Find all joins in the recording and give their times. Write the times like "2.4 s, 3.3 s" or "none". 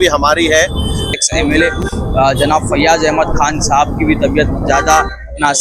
1.1 s

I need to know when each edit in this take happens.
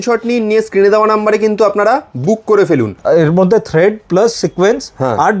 3.0 s

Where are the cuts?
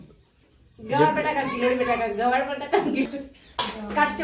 3.1 s

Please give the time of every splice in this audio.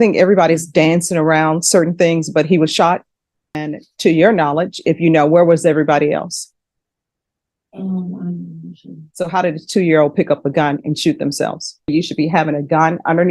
3.6 s, 11.9 s

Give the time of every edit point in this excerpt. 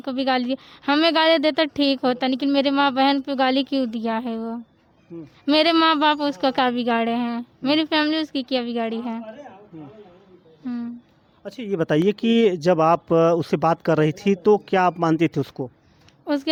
none

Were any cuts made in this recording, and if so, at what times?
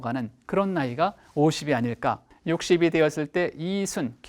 2.2 s

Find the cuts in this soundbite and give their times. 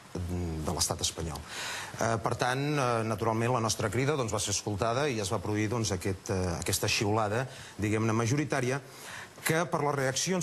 none

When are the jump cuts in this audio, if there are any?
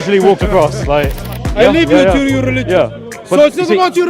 1.2 s

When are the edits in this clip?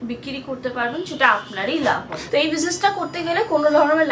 2.2 s

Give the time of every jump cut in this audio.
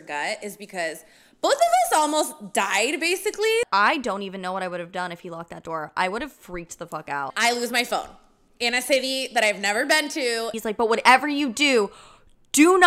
3.7 s, 7.3 s, 10.5 s

